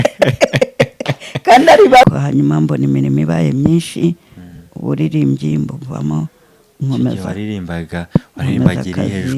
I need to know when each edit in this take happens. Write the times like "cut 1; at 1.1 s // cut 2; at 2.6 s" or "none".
cut 1; at 2.0 s